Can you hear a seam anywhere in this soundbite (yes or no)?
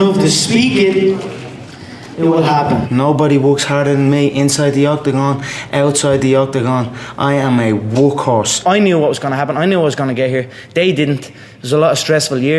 yes